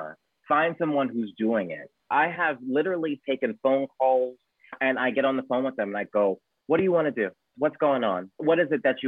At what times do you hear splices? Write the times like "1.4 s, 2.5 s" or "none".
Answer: 2.0 s, 4.8 s